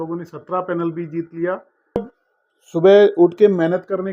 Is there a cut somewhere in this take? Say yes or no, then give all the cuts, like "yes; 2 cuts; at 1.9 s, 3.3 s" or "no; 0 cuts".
yes; 1 cut; at 2.0 s